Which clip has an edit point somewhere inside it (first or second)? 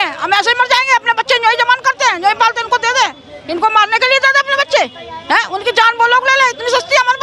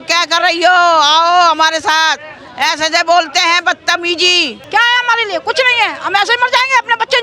second